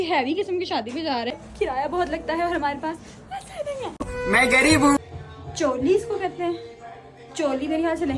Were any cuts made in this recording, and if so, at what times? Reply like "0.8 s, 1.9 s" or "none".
1.4 s, 5.0 s

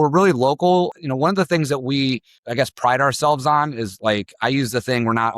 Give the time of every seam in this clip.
0.9 s, 2.4 s

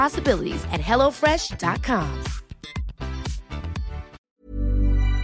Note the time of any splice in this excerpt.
4.2 s

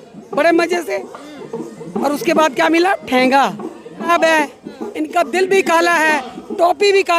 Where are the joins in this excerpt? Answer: 4.1 s

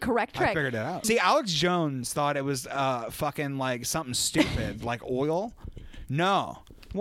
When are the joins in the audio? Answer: 1.0 s

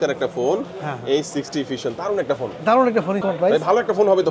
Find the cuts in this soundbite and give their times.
3.2 s

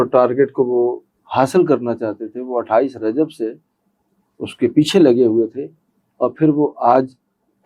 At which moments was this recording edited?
none

